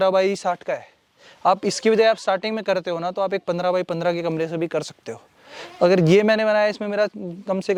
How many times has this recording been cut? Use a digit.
0